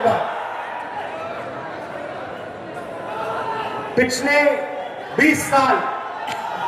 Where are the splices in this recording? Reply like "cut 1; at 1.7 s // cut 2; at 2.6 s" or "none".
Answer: none